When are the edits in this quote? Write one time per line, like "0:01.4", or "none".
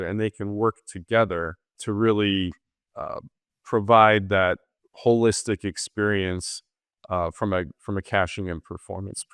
0:01.7